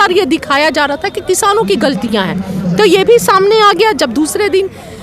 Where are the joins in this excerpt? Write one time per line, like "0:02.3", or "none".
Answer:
none